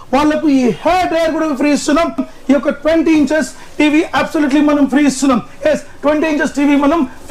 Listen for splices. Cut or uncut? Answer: cut